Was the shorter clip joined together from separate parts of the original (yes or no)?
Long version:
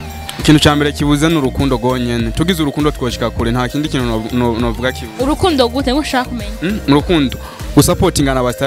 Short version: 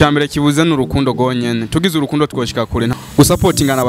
yes